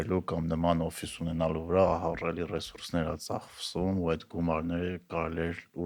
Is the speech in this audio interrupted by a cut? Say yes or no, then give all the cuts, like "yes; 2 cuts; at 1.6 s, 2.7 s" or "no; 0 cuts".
no; 0 cuts